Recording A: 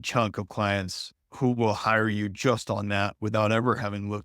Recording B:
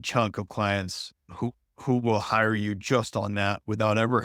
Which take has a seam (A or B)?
A